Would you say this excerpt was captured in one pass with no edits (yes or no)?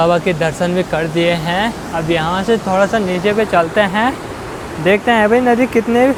yes